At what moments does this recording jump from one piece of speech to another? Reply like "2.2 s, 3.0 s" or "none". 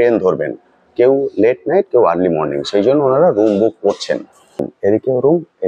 4.7 s